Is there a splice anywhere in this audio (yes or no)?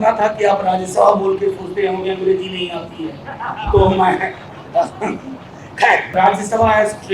yes